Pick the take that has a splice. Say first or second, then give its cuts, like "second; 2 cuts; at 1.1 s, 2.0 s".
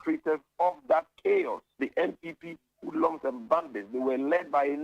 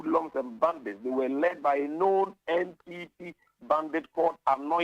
first; 1 cut; at 1.6 s